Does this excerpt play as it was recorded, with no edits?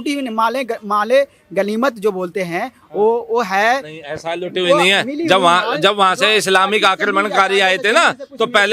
yes; 0 cuts

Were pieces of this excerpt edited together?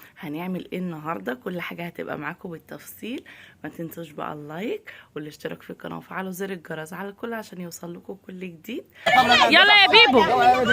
yes; 1 cut; at 9.1 s

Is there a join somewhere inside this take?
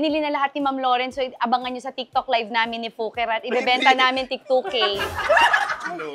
no; 0 cuts

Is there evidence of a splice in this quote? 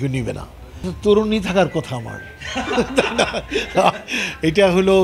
yes; 1 cut; at 0.9 s

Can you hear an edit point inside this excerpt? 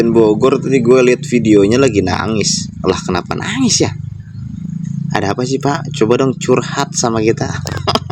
no; 0 cuts

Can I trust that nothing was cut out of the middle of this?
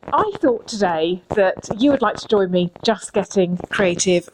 yes; 0 cuts

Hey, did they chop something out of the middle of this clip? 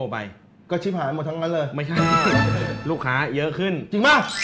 no; 0 cuts

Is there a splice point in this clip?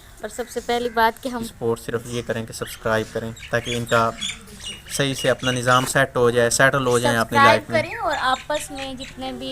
yes; 1 cut; at 1.5 s

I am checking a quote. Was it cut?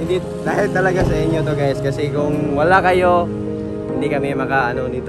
no; 0 cuts

